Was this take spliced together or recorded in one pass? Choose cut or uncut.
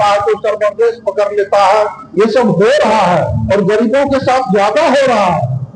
uncut